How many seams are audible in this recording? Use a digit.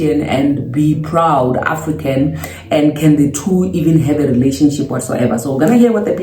0